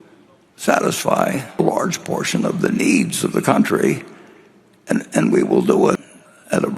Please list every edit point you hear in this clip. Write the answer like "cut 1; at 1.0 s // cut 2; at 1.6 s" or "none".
cut 1; at 1.6 s // cut 2; at 6.0 s